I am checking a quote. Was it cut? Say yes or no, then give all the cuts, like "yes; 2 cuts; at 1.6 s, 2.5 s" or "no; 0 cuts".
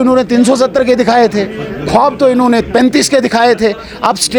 no; 0 cuts